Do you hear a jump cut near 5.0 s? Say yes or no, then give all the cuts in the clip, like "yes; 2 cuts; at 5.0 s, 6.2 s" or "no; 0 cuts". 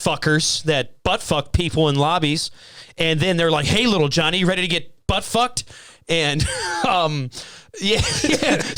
no; 0 cuts